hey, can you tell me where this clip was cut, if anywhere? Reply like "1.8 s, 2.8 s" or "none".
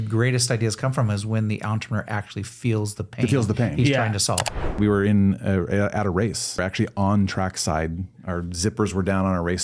4.5 s, 6.6 s